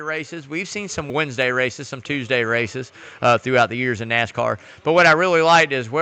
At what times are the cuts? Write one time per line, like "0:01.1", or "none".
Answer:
0:01.1